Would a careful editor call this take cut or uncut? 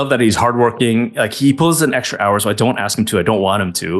uncut